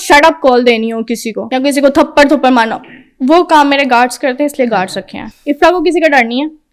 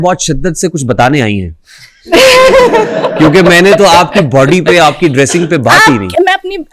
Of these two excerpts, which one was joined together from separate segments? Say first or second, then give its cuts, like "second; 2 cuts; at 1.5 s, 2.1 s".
first; 1 cut; at 1.4 s